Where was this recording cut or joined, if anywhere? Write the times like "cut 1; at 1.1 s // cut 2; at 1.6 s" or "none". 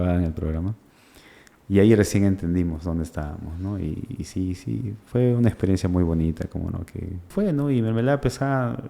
cut 1; at 7.3 s

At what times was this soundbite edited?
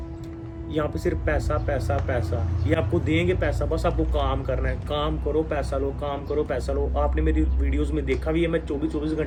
none

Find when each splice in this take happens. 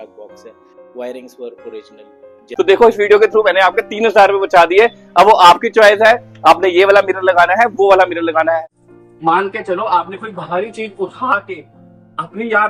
cut 1; at 2.5 s // cut 2; at 8.8 s

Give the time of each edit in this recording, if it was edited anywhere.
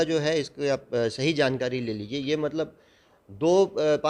none

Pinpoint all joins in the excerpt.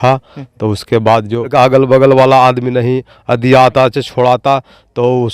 cut 1; at 1.5 s

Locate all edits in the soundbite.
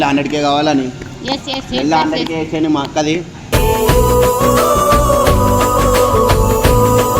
none

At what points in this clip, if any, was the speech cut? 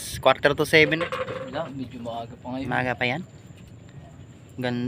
cut 1; at 1.0 s

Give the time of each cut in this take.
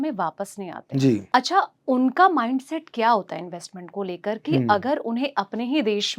cut 1; at 1.2 s

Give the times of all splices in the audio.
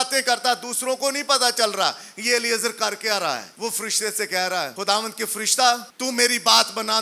cut 1; at 3.5 s // cut 2; at 4.7 s // cut 3; at 5.9 s

